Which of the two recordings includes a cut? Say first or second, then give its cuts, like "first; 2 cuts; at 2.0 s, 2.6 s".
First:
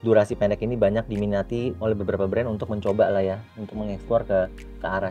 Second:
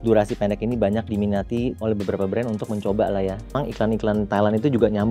second; 1 cut; at 3.5 s